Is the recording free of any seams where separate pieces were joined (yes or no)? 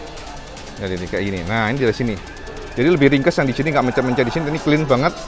yes